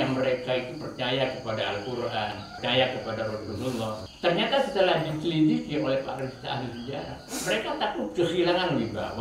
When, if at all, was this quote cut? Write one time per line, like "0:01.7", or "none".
0:02.4
0:04.1